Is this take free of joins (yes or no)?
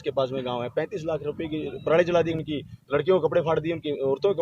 no